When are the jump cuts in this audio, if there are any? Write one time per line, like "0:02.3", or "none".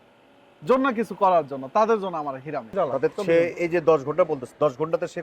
0:02.7